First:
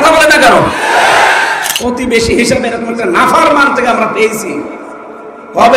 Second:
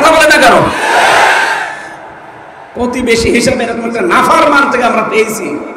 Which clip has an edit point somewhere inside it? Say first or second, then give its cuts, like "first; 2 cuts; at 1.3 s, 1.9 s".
first; 1 cut; at 1.7 s